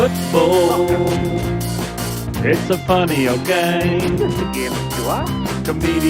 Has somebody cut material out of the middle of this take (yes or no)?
no